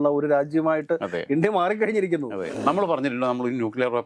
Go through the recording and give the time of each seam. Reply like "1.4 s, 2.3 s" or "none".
2.5 s